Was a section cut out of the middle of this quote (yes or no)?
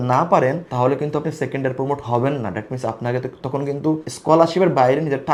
no